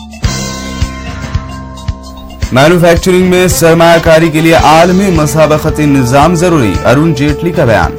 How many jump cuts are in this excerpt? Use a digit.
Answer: 0